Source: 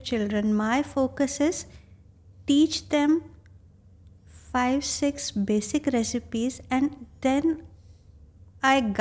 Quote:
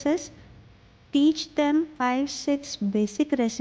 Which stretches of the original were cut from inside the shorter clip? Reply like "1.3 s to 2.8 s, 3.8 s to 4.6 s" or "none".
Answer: 3.3 s to 4.5 s